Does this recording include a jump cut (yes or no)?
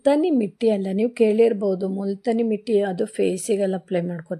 no